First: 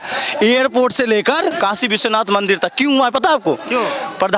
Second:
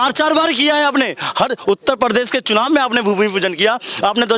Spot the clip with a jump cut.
first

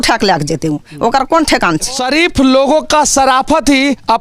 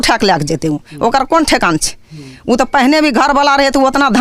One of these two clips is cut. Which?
first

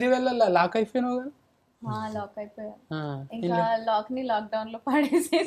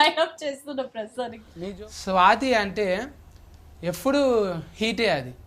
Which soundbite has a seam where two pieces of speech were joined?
second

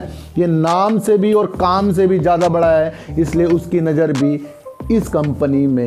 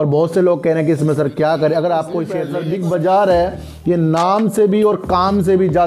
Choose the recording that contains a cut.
second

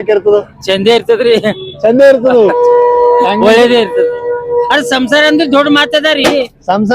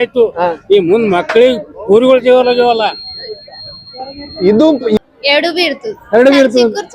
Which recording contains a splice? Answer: second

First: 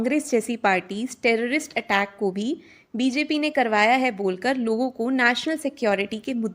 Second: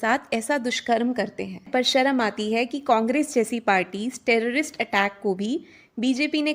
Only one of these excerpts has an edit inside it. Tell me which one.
second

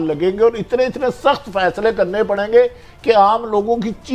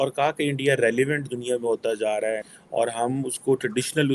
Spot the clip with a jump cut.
second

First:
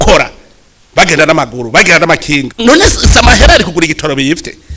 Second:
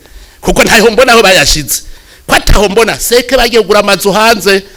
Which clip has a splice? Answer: first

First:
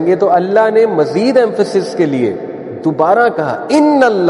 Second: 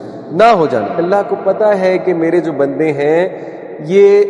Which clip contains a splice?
second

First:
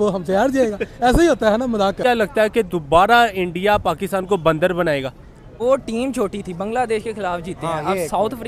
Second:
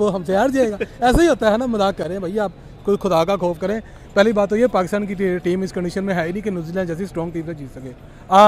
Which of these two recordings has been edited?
first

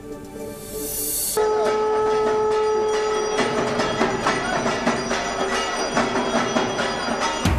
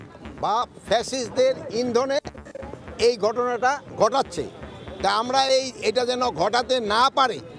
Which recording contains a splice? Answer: second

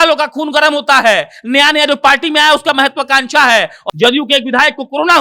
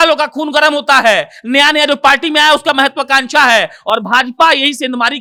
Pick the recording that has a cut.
first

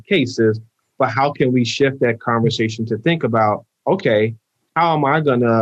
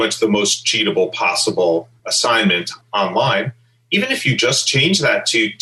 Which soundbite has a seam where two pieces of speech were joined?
second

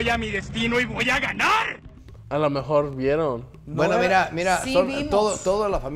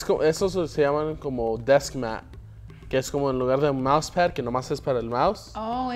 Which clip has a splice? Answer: first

